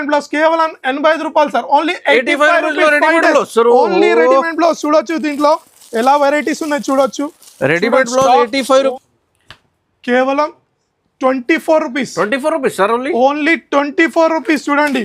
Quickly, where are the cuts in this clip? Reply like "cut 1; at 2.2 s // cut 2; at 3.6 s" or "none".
cut 1; at 8.9 s